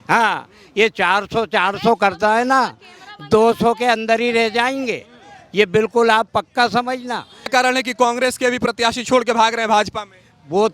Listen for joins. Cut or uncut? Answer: cut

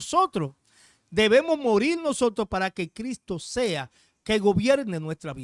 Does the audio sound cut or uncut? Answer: uncut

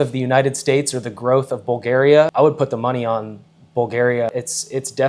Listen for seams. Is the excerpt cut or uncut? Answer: cut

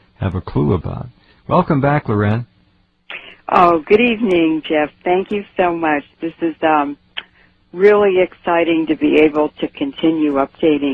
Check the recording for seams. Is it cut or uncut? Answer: uncut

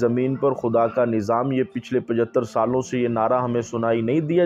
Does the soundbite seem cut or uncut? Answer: uncut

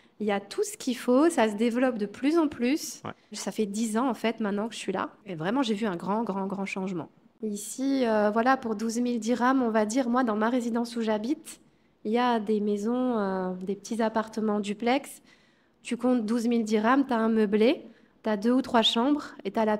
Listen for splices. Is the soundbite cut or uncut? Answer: cut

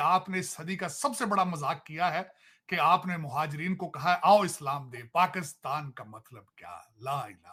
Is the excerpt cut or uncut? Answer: uncut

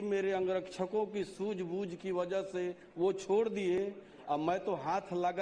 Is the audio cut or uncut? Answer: uncut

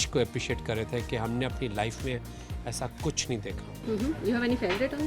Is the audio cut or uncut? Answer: uncut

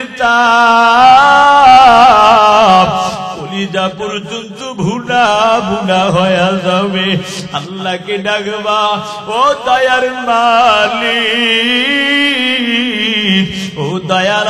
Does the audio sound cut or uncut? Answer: uncut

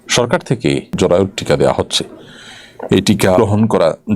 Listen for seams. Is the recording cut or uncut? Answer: cut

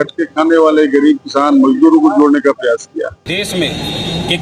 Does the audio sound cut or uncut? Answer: cut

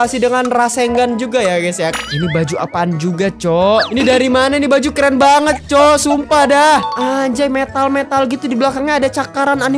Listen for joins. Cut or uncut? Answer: cut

